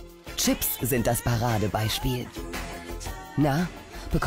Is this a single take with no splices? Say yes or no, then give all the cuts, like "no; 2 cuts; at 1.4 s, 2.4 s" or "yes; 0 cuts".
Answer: yes; 0 cuts